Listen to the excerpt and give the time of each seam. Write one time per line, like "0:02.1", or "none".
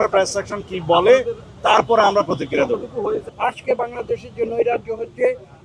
0:03.3